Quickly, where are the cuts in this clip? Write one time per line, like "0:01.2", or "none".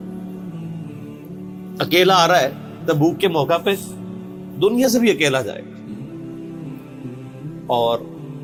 none